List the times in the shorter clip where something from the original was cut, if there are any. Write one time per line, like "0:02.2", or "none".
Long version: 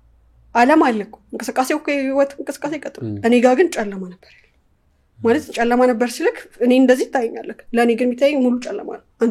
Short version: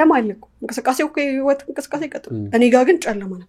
none

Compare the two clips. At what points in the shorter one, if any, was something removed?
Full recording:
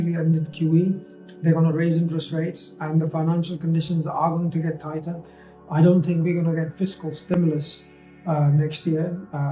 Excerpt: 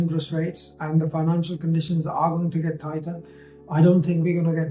none

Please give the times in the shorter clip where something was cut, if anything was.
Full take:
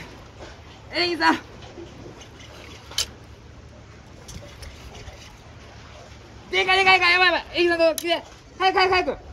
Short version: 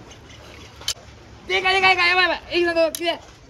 0:00.9

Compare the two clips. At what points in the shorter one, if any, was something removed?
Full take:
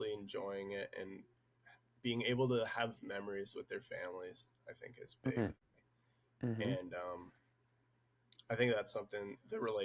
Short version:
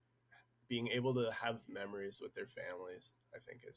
none

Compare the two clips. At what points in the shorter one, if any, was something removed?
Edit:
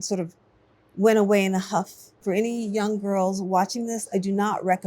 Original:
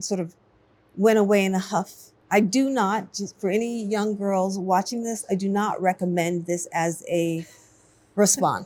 0:02.1

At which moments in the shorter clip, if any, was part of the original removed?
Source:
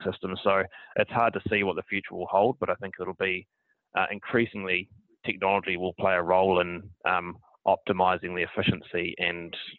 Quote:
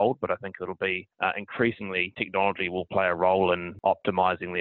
0:01.1
0:02.1
0:03.7

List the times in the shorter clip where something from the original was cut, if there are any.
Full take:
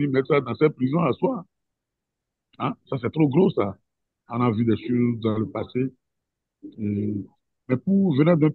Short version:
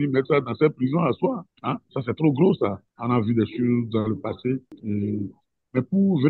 0:01.5
0:02.9
0:04.7

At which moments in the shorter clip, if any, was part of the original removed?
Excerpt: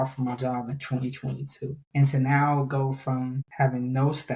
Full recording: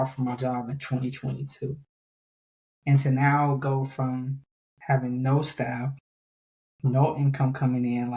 0:01.8
0:03.4

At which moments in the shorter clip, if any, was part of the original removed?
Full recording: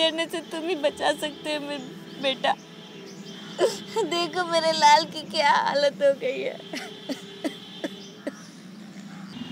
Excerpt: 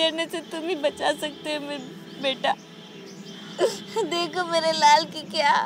none

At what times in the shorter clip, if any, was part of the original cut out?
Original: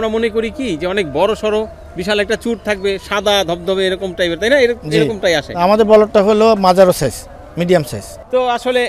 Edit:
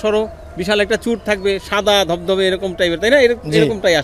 none

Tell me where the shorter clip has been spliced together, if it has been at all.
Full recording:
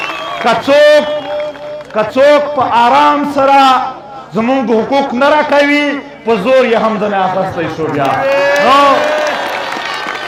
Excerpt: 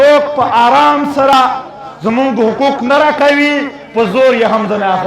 0:01.3

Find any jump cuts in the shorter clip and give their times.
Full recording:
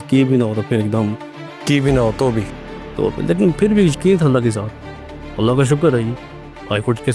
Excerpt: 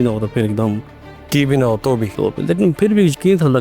0:02.1

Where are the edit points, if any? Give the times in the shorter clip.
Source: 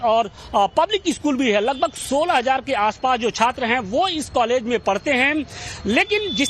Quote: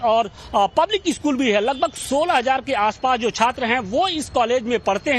none

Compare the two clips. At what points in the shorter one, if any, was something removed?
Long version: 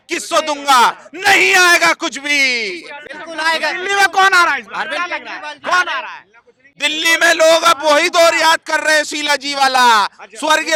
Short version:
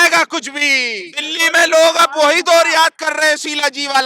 0:01.2

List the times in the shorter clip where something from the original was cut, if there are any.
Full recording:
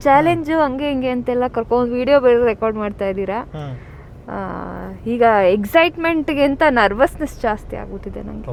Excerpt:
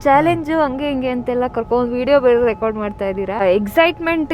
0:03.4

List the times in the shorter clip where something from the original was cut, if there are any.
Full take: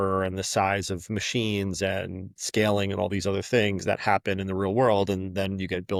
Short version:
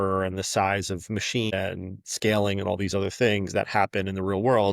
0:01.5

